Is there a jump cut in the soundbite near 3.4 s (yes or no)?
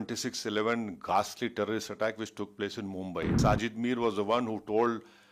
yes